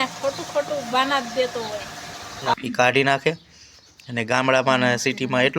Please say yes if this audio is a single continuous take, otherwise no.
no